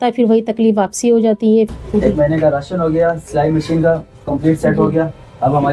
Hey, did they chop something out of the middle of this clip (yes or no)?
yes